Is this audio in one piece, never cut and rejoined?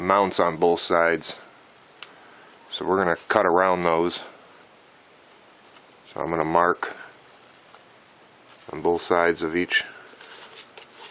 no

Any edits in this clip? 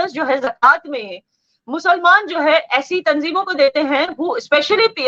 no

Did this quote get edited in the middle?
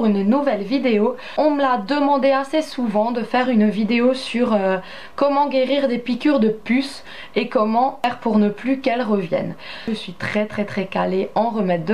no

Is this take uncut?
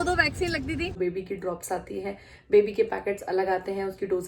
no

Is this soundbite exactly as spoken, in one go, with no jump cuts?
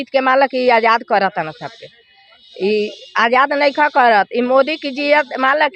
yes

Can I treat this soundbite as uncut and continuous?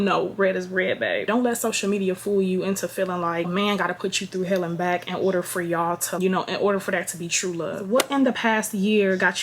no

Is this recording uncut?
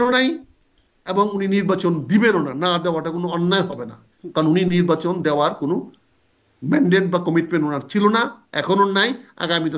yes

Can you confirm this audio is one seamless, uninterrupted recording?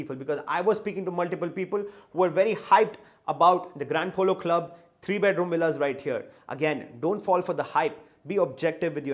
yes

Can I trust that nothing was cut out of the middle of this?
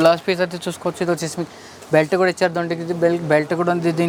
yes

